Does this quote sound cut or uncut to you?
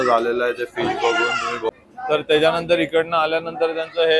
cut